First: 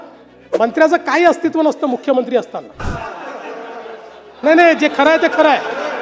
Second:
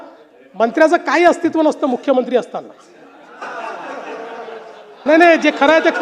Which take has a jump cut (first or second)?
first